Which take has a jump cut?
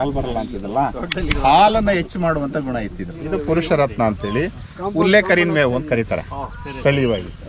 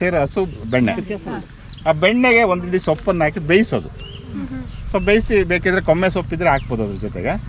first; 1 cut; at 3.2 s

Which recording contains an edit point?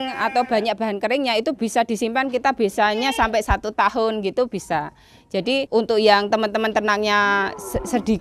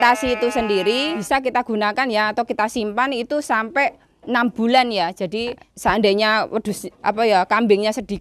second; 2 cuts; at 1.2 s, 5.6 s

